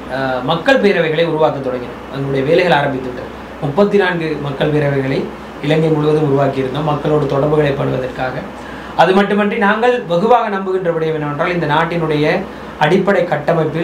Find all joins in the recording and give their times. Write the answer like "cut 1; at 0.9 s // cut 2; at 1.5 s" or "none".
none